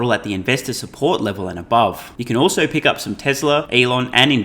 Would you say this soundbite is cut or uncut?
cut